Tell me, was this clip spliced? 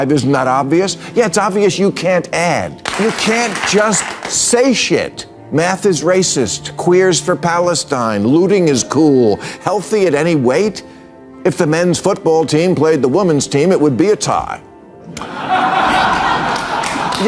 yes; 1 cut; at 2.8 s

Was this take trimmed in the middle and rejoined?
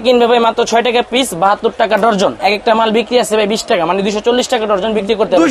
no; 0 cuts

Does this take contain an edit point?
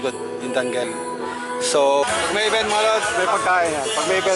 yes; 1 cut; at 2.1 s

